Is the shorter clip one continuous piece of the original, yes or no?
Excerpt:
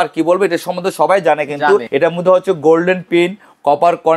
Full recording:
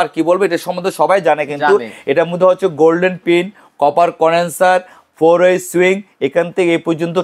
no